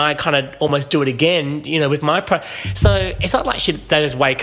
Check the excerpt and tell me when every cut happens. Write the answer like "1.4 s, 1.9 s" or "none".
none